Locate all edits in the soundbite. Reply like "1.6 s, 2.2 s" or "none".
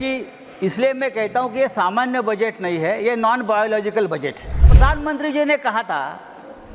4.7 s